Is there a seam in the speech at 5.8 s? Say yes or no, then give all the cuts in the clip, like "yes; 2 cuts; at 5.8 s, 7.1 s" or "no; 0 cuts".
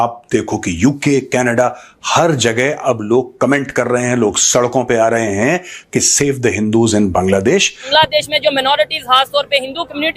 no; 1 cut; at 7.8 s